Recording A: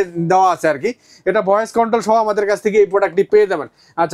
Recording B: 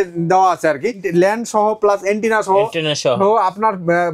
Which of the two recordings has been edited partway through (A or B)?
B